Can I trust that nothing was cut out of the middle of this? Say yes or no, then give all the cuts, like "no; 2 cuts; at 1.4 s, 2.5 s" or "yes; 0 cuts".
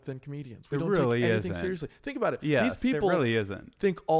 yes; 0 cuts